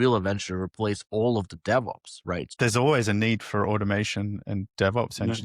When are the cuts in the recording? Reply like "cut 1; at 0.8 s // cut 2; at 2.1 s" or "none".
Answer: cut 1; at 2.5 s